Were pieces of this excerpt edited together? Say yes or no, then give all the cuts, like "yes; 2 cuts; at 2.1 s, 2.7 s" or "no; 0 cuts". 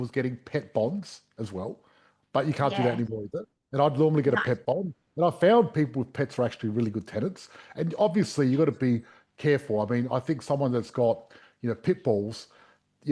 no; 0 cuts